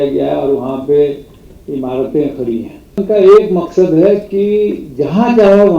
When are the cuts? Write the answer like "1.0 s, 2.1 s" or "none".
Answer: 3.0 s